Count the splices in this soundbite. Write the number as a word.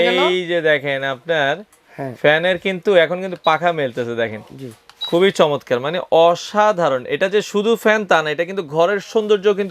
zero